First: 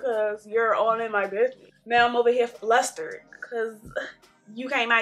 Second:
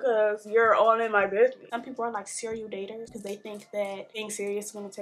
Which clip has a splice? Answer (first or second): second